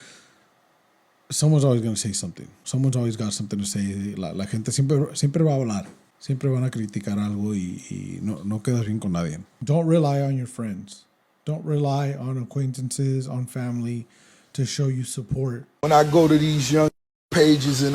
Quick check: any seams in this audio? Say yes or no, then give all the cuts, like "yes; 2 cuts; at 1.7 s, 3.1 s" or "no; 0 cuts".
yes; 2 cuts; at 9.5 s, 15.7 s